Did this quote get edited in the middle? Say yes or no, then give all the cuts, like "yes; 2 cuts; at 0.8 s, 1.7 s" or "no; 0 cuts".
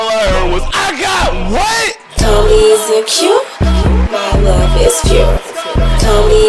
yes; 1 cut; at 2.0 s